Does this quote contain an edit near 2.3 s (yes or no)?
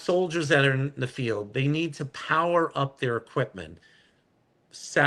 no